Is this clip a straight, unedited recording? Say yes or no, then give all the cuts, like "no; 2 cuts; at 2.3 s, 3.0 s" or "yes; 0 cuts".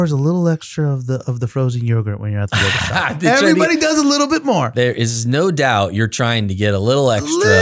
yes; 0 cuts